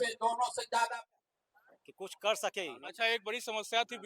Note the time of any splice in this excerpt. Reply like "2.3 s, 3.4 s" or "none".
1.0 s